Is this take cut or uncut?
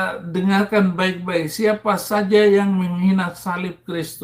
uncut